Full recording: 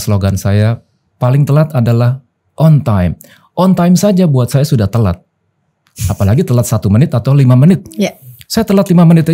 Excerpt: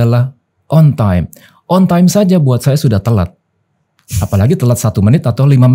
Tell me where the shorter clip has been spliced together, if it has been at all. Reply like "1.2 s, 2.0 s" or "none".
none